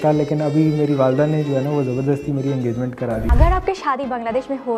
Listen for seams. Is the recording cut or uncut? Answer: cut